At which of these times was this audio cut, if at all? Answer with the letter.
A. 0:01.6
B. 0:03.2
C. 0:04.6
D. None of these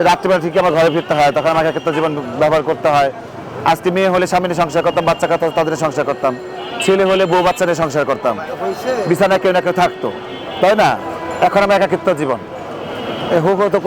D